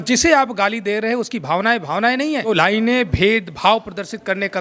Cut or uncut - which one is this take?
cut